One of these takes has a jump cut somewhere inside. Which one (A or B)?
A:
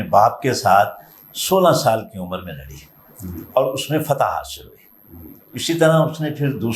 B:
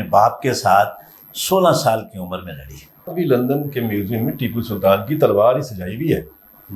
B